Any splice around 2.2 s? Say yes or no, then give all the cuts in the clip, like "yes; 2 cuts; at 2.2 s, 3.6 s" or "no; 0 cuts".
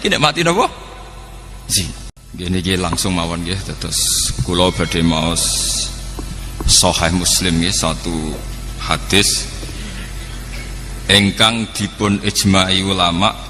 yes; 1 cut; at 2.2 s